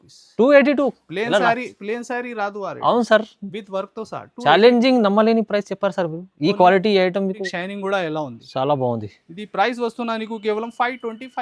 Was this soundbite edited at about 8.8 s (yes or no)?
no